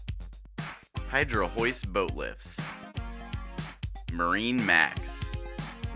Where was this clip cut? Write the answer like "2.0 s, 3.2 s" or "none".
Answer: 0.7 s, 4.9 s